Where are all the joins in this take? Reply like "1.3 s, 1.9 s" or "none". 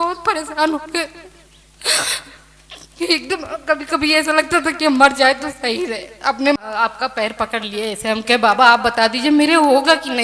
6.6 s